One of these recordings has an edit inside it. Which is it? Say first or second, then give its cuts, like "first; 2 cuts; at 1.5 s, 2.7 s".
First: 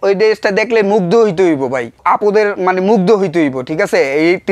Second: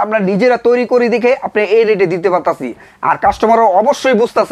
first; 1 cut; at 2.0 s